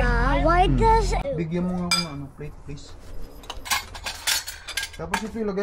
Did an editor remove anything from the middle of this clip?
yes; 2 cuts; at 1.2 s, 3.7 s

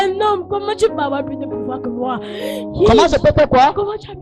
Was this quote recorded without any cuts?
yes; 0 cuts

